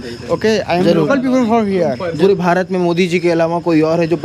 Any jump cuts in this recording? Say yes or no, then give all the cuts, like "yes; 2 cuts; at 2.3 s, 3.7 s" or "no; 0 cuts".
yes; 1 cut; at 2.1 s